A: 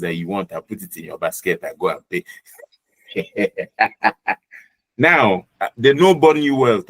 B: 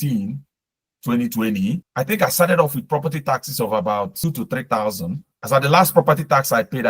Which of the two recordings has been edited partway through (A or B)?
B